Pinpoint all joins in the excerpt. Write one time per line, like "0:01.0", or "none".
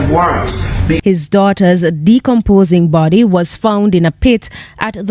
0:01.0